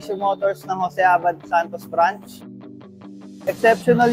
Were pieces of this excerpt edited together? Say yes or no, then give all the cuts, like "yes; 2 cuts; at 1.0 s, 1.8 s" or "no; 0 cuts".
yes; 1 cut; at 2.8 s